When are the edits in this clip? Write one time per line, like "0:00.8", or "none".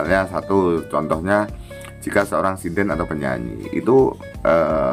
none